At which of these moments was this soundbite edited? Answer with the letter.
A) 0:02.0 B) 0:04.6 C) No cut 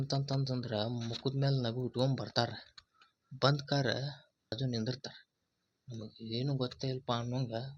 B